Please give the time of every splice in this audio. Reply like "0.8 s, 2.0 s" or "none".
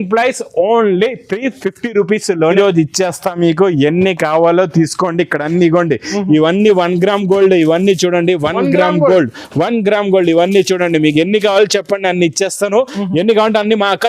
2.5 s